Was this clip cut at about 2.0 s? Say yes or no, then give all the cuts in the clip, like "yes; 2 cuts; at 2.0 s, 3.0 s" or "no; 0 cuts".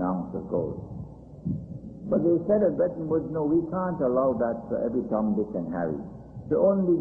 no; 0 cuts